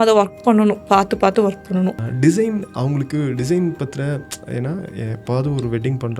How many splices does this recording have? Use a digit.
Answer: 1